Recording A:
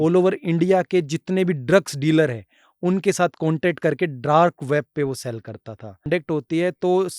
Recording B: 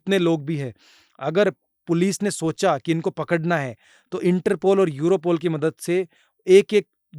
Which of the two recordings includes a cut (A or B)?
A